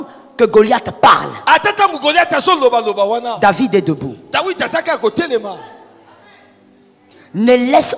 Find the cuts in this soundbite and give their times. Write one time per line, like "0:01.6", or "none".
none